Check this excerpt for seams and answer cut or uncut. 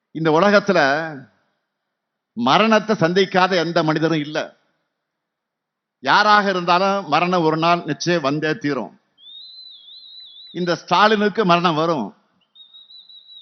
uncut